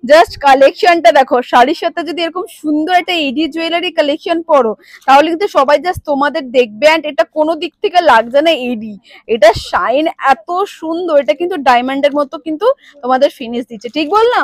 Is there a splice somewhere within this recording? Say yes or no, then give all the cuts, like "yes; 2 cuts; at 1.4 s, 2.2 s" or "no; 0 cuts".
no; 0 cuts